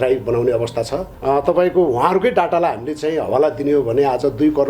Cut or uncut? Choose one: cut